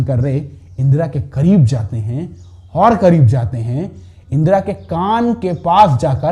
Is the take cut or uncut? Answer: uncut